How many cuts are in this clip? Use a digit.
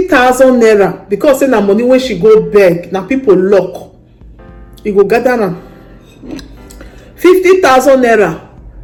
0